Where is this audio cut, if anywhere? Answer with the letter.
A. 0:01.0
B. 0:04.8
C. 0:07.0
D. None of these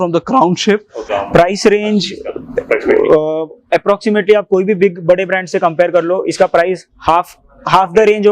A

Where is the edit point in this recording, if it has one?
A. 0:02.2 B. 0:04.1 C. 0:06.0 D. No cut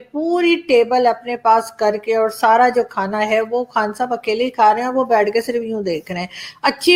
D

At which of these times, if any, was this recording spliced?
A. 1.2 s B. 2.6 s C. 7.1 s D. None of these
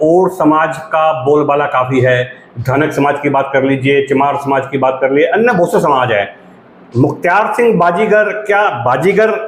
D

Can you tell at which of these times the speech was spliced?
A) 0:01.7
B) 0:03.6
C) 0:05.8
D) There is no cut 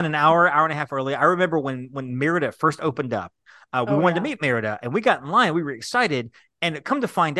D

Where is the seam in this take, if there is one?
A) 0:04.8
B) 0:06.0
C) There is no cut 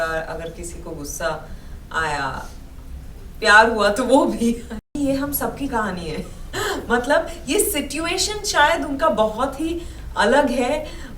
A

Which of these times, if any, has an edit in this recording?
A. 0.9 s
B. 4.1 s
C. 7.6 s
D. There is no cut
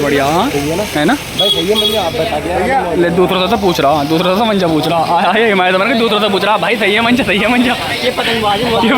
D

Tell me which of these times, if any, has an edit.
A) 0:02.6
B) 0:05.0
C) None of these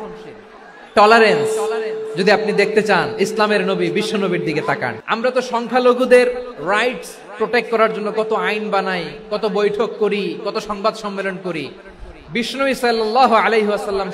B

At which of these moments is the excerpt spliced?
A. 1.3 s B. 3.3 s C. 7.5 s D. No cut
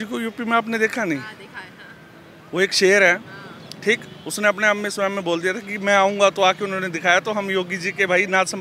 D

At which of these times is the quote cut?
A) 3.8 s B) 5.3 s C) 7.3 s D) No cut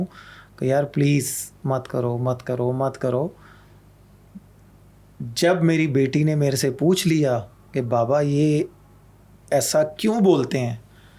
D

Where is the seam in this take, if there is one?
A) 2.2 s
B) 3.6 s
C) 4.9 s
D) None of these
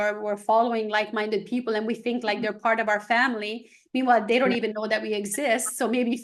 D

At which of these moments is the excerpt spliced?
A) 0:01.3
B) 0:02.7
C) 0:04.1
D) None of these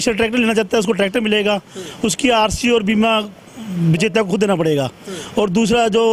D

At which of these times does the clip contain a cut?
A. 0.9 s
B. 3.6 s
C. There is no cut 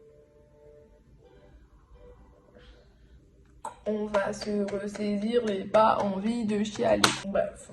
C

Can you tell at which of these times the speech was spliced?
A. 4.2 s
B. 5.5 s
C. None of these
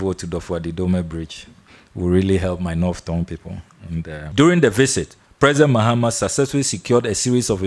A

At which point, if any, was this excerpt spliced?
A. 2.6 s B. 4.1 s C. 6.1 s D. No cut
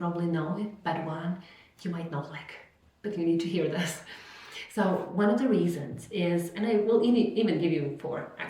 D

